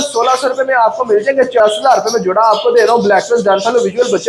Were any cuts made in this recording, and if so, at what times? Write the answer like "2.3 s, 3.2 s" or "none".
1.6 s